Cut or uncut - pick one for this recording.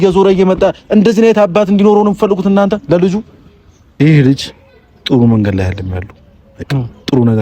cut